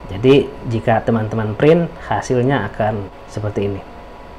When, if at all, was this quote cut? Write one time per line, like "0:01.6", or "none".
0:03.2